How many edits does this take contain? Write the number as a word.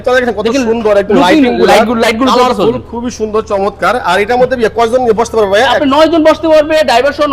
zero